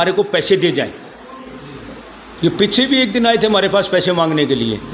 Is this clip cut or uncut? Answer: uncut